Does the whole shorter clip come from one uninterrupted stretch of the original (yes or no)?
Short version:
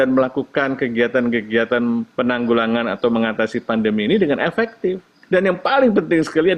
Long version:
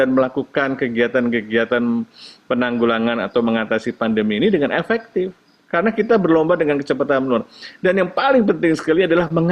no